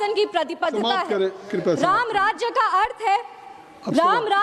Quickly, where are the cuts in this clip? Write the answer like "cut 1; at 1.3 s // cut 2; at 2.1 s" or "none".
none